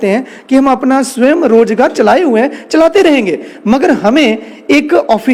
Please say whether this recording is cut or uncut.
uncut